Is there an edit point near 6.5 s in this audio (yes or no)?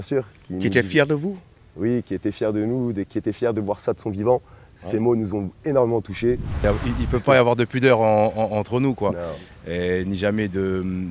yes